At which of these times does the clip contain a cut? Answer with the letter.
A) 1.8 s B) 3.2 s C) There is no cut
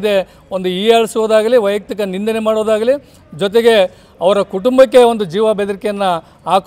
C